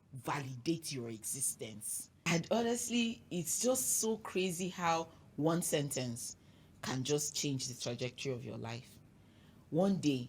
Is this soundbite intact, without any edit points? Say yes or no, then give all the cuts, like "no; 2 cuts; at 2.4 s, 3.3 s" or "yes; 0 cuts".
no; 1 cut; at 2.0 s